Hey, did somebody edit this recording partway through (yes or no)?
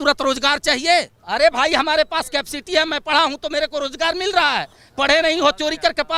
yes